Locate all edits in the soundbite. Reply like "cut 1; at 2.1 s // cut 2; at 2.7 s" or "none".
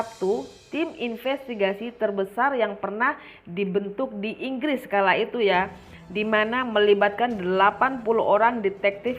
none